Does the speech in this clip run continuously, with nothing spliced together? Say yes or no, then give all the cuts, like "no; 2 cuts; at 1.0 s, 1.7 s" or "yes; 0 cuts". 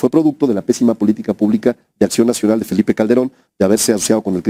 yes; 0 cuts